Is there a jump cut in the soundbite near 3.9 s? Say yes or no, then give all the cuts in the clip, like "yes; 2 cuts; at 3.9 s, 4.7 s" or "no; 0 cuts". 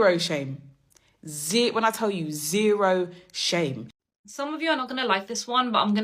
yes; 1 cut; at 3.9 s